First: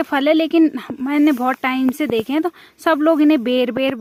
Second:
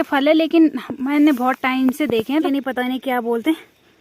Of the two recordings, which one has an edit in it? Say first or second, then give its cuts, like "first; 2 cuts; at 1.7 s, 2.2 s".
second; 1 cut; at 2.5 s